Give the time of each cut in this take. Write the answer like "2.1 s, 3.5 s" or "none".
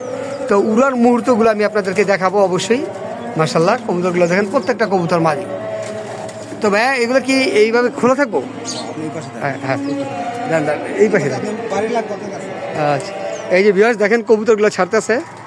none